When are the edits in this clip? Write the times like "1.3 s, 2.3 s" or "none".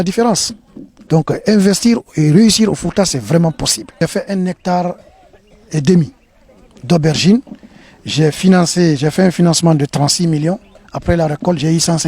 4.0 s